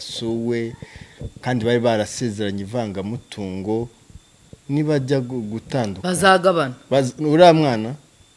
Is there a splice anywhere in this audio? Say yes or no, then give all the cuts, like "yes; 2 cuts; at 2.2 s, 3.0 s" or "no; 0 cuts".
no; 0 cuts